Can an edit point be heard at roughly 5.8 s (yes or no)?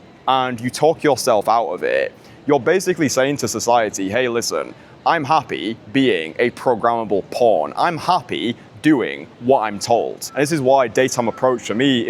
no